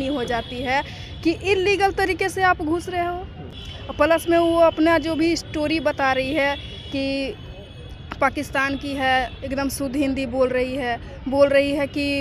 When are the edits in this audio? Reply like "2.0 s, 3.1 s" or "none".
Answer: none